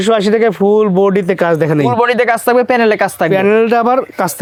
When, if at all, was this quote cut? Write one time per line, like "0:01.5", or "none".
none

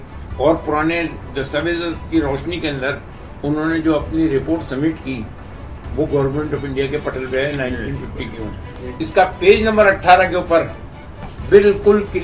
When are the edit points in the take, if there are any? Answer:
0:08.8

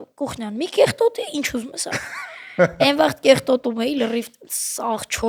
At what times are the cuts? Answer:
none

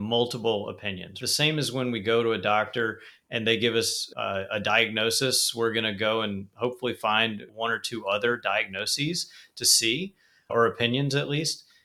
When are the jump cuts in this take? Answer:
0:01.2

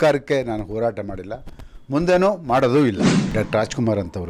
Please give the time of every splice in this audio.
0:03.1

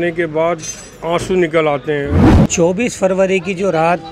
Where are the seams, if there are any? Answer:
0:02.2

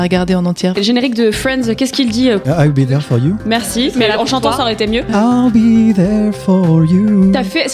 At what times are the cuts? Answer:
0:00.8
0:02.4
0:05.1

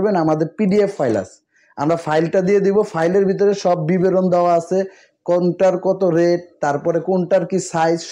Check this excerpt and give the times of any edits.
none

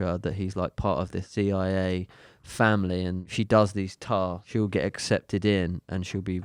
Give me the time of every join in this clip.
0:01.2
0:03.2
0:04.4

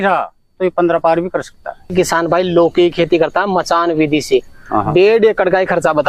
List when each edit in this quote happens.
0:01.9

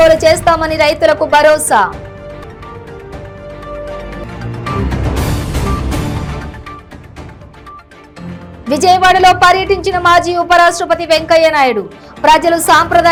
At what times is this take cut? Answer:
none

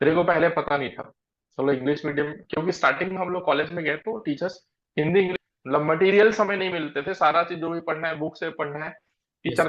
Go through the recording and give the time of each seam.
0:05.3

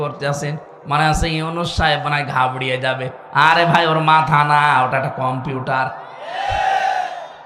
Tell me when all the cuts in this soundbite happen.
none

